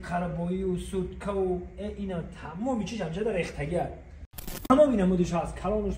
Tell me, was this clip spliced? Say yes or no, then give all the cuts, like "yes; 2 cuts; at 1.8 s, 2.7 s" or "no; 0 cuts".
yes; 1 cut; at 4.7 s